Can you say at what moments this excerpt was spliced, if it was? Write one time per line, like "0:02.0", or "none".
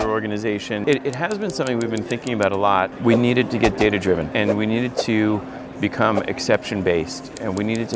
0:00.8
0:02.9
0:04.3